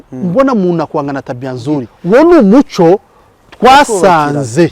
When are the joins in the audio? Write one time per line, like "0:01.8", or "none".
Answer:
0:01.9